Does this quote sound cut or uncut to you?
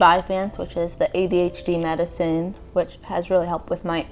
uncut